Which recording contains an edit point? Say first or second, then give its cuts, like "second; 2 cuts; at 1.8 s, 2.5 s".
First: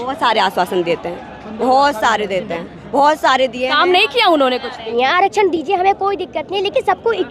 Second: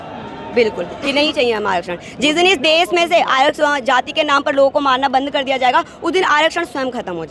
first; 1 cut; at 4.9 s